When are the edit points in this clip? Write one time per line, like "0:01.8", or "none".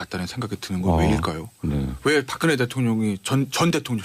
none